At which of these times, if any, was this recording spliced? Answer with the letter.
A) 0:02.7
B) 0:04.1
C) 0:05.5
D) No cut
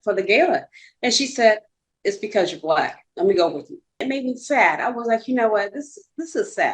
B